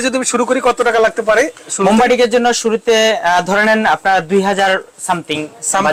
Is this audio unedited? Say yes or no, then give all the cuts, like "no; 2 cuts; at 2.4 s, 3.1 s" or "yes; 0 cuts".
yes; 0 cuts